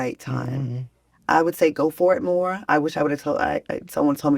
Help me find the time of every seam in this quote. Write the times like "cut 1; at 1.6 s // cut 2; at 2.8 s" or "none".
cut 1; at 2.9 s